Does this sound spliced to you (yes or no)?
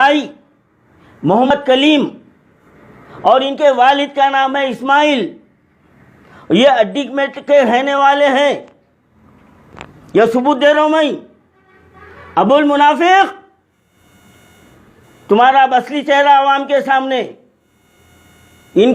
yes